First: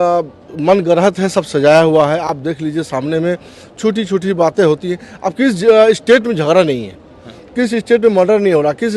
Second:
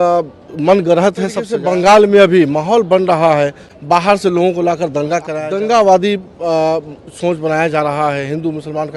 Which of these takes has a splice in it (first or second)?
second